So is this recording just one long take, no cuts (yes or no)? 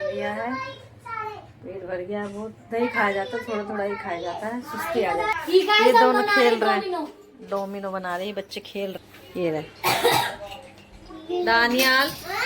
no